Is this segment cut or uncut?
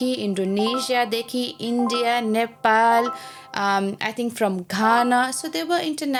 uncut